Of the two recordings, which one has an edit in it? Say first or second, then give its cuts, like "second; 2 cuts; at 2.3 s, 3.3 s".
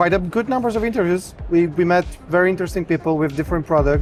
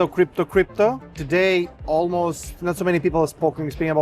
second; 1 cut; at 1.4 s